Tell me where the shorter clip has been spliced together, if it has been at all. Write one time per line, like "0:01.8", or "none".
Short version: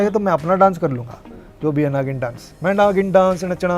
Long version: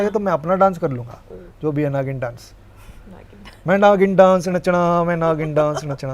0:02.5